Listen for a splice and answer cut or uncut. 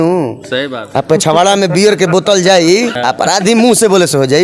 cut